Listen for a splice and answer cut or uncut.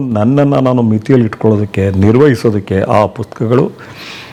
uncut